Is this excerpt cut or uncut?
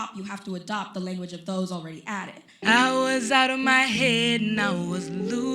cut